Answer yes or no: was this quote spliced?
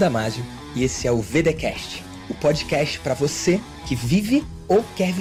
no